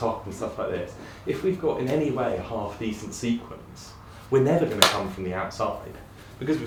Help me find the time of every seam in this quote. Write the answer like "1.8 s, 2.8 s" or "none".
none